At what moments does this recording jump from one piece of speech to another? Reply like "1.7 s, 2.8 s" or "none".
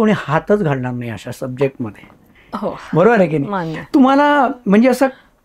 none